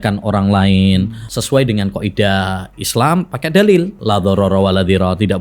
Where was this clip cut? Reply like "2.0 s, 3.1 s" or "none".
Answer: 1.2 s, 4.0 s

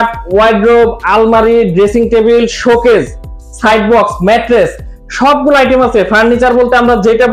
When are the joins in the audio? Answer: none

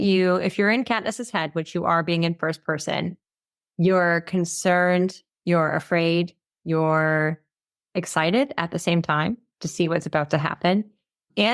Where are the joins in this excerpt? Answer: 5.3 s, 6.5 s

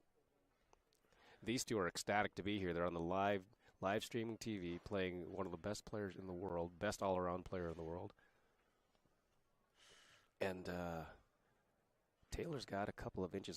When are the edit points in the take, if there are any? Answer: 11.7 s

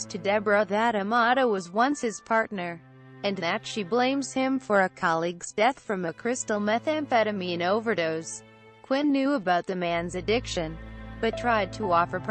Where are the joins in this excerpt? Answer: 4.7 s

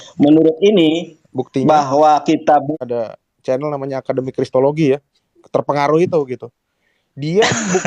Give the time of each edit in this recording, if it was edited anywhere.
2.7 s

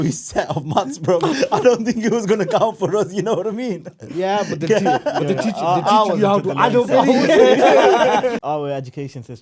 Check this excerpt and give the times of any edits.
8.4 s

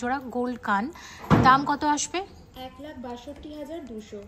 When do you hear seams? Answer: none

